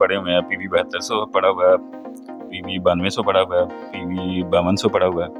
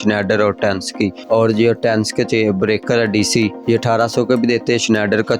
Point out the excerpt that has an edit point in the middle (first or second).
second